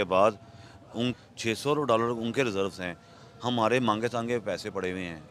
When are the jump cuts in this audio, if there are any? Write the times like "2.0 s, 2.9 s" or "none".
1.2 s